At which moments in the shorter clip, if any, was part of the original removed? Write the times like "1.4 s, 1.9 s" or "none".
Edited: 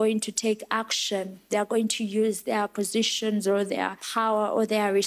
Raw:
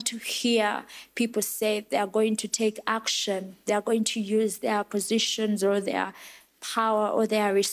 4.0 s